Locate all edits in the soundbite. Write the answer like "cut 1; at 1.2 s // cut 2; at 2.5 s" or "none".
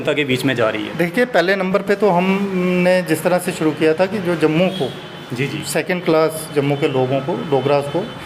none